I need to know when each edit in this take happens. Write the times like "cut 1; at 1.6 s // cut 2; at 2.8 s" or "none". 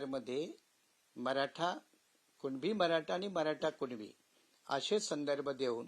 none

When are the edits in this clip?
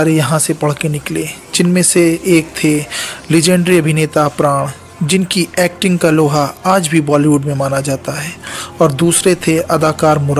none

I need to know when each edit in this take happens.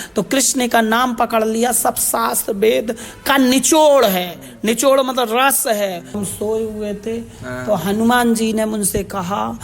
cut 1; at 6.2 s

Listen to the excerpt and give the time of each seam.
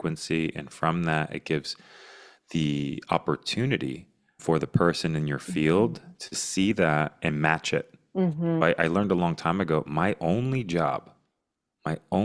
cut 1; at 8.6 s

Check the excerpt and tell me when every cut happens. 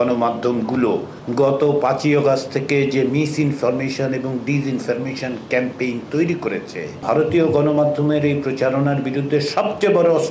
cut 1; at 1.2 s // cut 2; at 7.0 s

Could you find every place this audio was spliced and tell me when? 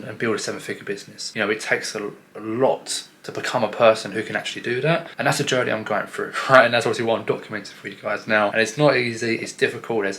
cut 1; at 1.2 s // cut 2; at 5.1 s // cut 3; at 8.5 s

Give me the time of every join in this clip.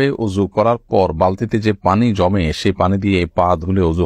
none

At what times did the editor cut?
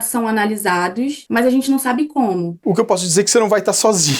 cut 1; at 1.2 s // cut 2; at 2.5 s

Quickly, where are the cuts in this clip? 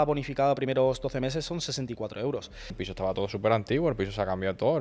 cut 1; at 2.7 s

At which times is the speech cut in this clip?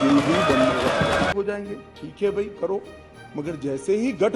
cut 1; at 1.3 s

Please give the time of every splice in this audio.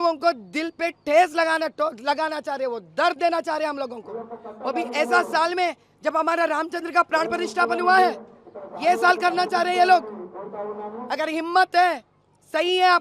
none

